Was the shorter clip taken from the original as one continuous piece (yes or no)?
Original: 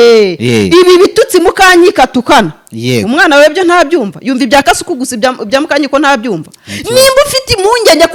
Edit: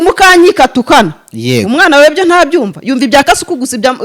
yes